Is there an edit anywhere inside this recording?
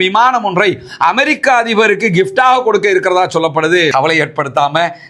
yes; 1 cut; at 3.9 s

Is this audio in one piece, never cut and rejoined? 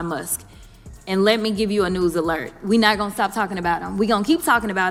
yes; 0 cuts

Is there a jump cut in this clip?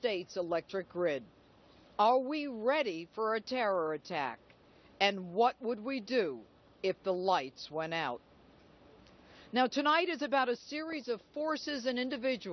yes; 1 cut; at 7.7 s

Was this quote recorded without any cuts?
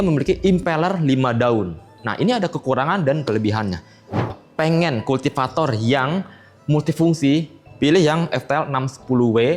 no; 1 cut; at 4.3 s

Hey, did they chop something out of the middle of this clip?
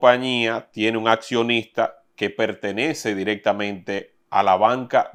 no; 0 cuts

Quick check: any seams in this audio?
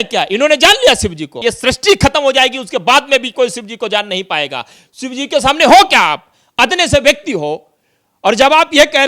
yes; 1 cut; at 1.3 s

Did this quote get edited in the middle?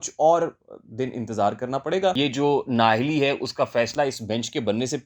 yes; 1 cut; at 2.1 s

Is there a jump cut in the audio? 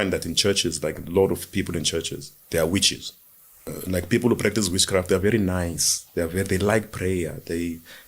yes; 1 cut; at 3.6 s

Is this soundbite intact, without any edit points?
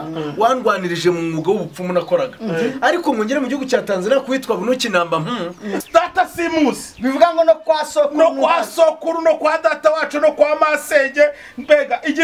no; 1 cut; at 5.7 s

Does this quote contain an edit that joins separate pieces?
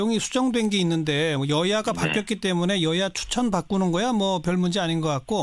yes; 1 cut; at 1.6 s

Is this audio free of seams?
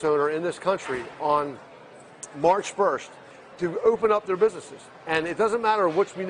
yes; 0 cuts

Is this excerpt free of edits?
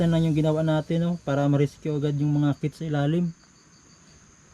yes; 0 cuts

